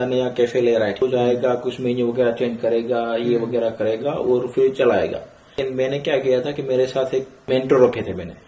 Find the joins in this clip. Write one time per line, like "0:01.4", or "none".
0:01.0
0:05.5
0:07.3